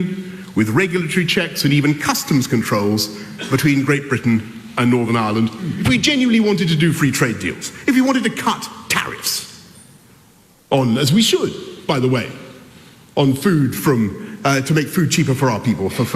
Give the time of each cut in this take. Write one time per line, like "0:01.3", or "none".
0:05.5